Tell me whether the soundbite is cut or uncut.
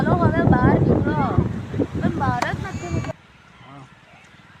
cut